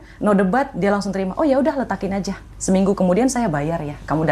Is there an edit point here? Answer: no; 0 cuts

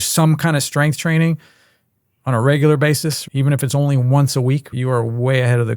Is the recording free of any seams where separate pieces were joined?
no; 2 cuts; at 3.2 s, 4.7 s

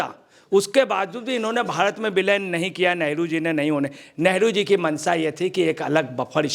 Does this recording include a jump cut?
no; 0 cuts

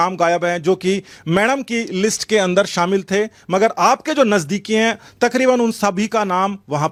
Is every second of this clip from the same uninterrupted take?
yes; 0 cuts

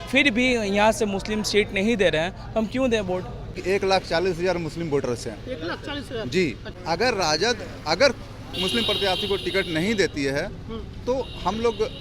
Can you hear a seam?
yes; 2 cuts; at 3.5 s, 6.7 s

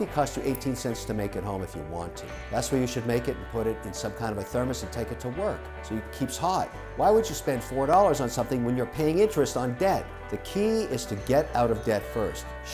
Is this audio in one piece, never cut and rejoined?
yes; 0 cuts

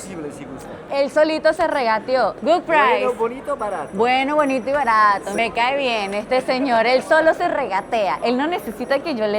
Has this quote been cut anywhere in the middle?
yes; 3 cuts; at 0.9 s, 2.4 s, 5.4 s

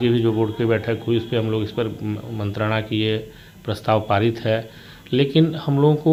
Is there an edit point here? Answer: no; 0 cuts

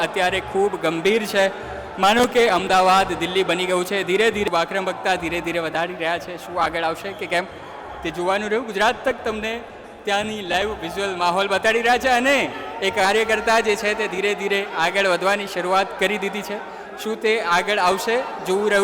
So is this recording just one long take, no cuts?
no; 1 cut; at 4.5 s

